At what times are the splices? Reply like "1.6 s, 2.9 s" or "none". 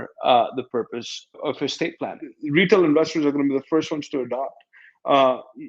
2.3 s